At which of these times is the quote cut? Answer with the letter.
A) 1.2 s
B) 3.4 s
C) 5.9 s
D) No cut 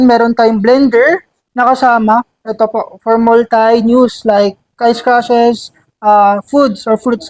D